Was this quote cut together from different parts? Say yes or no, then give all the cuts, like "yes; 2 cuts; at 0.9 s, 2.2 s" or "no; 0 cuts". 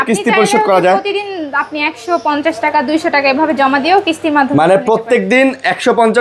no; 0 cuts